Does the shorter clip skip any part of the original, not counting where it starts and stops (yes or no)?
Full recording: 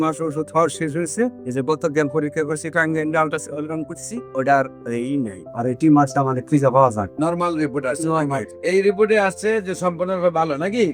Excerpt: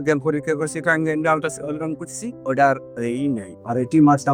no